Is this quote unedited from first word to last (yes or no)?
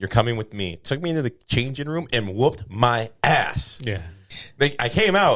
yes